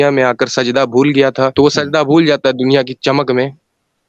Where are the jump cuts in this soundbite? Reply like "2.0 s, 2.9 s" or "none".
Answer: 1.5 s